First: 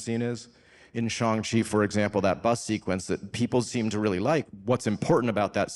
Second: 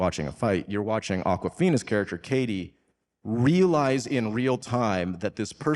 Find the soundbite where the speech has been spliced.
first; 1 cut; at 4.5 s

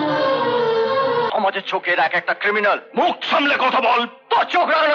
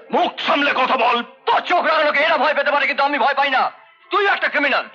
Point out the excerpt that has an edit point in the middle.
first; 1 cut; at 1.3 s

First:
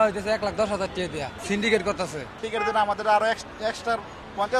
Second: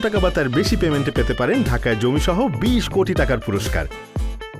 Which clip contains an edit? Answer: first; 2 cuts; at 1.4 s, 2.4 s

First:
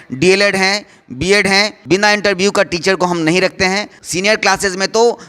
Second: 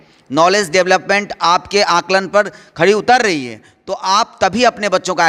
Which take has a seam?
first; 2 cuts; at 1.8 s, 3.9 s

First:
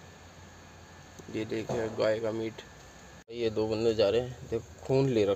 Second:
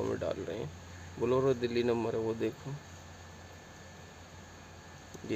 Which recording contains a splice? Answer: first; 1 cut; at 3.4 s

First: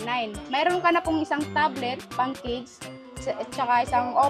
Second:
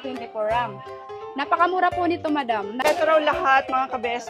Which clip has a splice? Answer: second; 1 cut; at 2.8 s

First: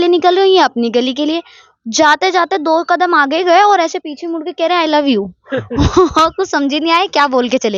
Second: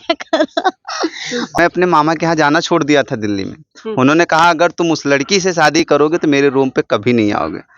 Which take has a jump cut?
second; 1 cut; at 1.6 s

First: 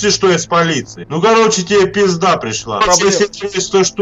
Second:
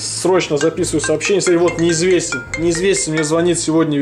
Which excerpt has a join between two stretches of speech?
first; 2 cuts; at 1.0 s, 2.8 s

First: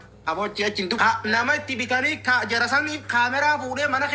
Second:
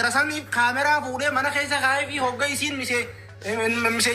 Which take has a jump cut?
first; 1 cut; at 1.0 s

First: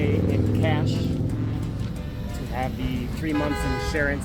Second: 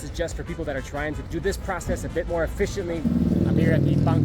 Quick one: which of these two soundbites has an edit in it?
second; 1 cut; at 3.0 s

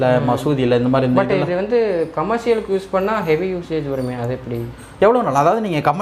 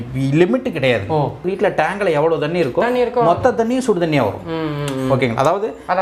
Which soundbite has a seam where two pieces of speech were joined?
second; 1 cut; at 1.5 s

